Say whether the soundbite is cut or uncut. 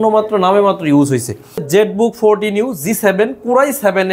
cut